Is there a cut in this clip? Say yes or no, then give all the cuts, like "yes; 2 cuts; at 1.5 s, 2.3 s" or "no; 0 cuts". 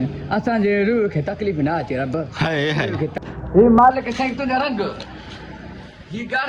yes; 1 cut; at 3.2 s